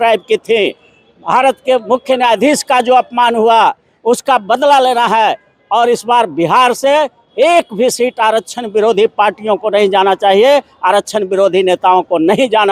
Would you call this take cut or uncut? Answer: uncut